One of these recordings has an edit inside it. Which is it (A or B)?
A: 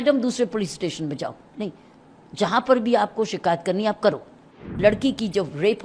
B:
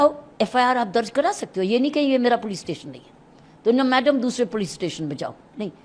A